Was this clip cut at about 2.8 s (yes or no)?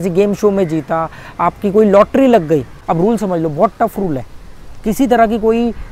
yes